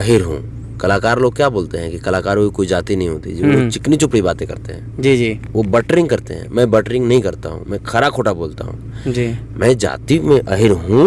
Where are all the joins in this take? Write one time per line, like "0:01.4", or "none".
none